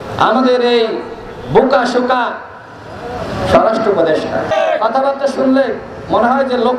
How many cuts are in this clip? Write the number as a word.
one